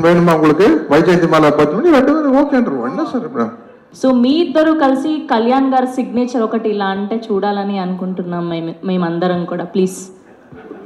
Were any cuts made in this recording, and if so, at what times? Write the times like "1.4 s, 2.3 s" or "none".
3.8 s